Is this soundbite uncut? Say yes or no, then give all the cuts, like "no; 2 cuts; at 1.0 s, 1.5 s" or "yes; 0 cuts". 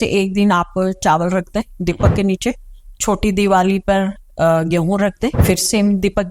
no; 1 cut; at 5.4 s